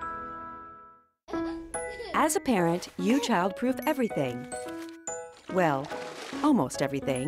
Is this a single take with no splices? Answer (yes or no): no